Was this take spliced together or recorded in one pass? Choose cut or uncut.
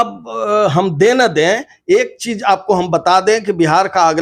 uncut